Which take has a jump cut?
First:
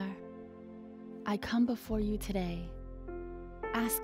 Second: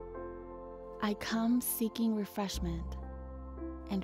second; 1 cut; at 1.0 s

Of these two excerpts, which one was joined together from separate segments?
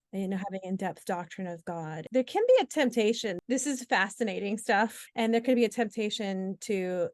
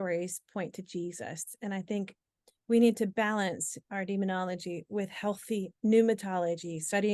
first; 3 cuts; at 2.0 s, 3.4 s, 5.0 s

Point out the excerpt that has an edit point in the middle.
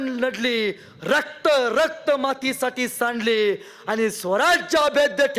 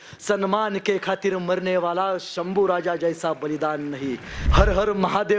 second; 1 cut; at 4.3 s

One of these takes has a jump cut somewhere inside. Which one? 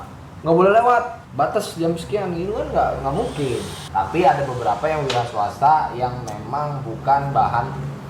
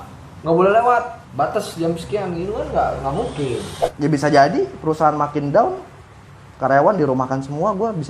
second; 1 cut; at 3.7 s

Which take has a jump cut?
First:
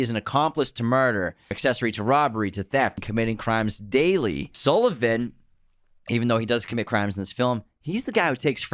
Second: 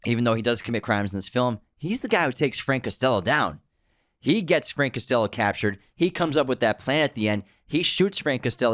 first; 3 cuts; at 1.6 s, 3.0 s, 4.5 s

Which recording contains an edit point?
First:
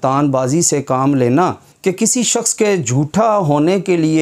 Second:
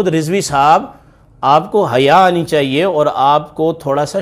first; 1 cut; at 1.7 s

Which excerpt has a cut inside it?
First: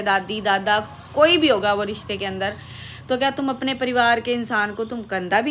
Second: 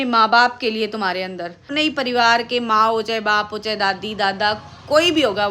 second; 1 cut; at 1.7 s

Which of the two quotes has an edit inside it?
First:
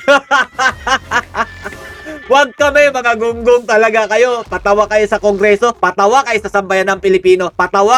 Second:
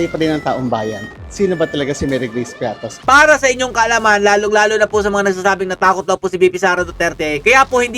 second; 1 cut; at 3.0 s

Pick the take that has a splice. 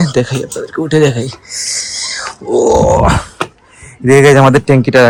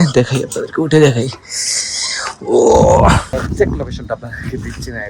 second; 1 cut; at 3.4 s

